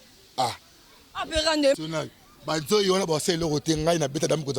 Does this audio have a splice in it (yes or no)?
yes